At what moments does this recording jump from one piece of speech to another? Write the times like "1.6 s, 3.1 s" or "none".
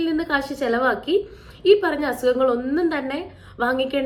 none